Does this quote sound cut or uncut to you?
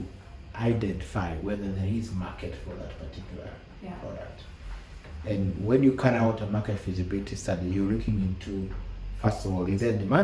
uncut